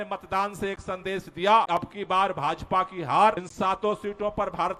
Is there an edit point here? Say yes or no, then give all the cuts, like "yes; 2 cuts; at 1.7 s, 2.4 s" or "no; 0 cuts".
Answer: yes; 2 cuts; at 1.7 s, 3.5 s